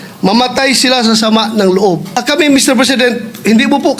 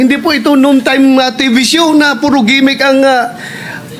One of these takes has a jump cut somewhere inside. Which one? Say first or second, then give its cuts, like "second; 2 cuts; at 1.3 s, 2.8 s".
first; 1 cut; at 2.2 s